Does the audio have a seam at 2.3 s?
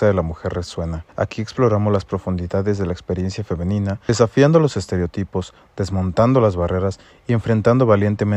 no; 2 cuts; at 1.0 s, 4.1 s

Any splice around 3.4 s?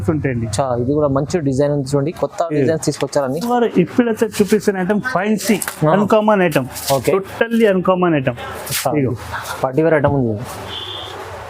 yes; 1 cut; at 3.4 s

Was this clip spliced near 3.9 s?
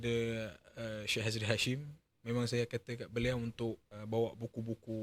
yes; 1 cut; at 3.9 s

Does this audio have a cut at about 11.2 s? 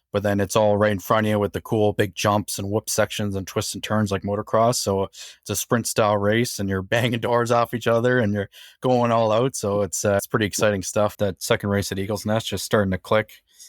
yes; 1 cut; at 11.2 s

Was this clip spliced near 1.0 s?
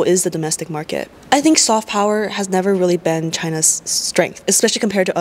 yes; 1 cut; at 1.0 s

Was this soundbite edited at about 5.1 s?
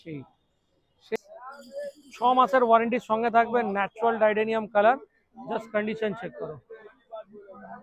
no; 1 cut; at 1.2 s

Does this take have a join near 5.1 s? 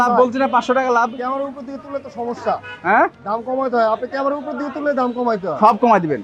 no; 0 cuts

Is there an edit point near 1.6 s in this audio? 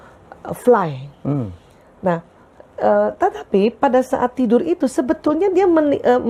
no; 0 cuts

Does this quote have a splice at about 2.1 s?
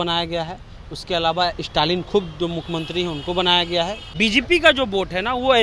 no; 1 cut; at 4.0 s

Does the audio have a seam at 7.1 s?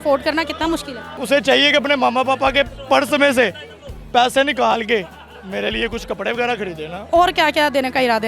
yes; 2 cuts; at 1.1 s, 7.1 s

